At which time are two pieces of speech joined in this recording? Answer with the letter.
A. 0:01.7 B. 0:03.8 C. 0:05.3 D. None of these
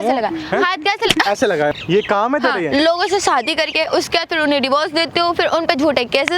A